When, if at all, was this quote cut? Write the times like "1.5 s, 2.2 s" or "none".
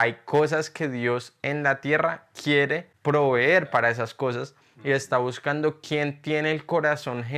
2.9 s